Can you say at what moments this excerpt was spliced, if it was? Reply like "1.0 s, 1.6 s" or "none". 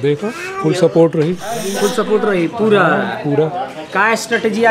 none